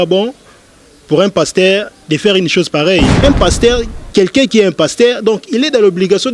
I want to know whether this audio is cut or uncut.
cut